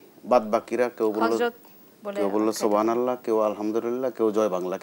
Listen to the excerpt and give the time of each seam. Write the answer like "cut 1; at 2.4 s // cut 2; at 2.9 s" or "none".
none